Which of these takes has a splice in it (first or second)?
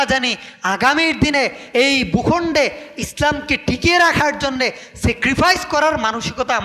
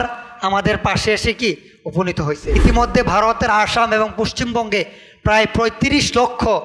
second